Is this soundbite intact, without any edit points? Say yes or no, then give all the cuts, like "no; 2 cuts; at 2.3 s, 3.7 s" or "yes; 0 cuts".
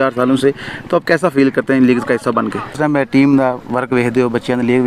no; 1 cut; at 2.7 s